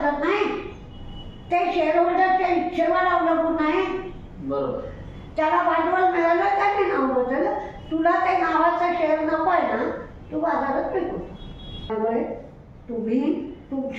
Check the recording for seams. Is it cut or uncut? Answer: cut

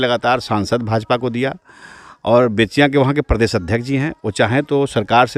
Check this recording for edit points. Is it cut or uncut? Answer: uncut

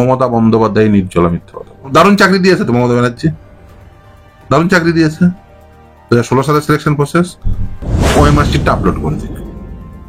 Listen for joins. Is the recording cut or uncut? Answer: cut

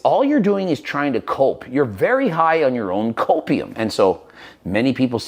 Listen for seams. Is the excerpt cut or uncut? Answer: cut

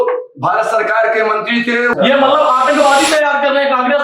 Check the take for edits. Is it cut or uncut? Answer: cut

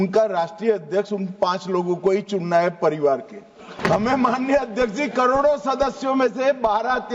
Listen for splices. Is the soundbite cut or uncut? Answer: cut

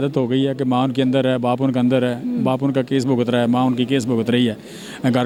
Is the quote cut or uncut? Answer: uncut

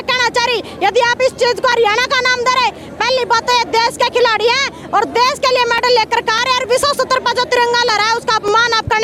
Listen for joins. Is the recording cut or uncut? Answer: uncut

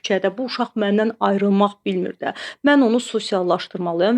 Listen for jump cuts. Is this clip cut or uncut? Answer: uncut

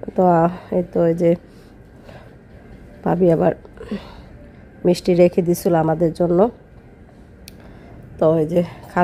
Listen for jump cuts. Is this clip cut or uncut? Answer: uncut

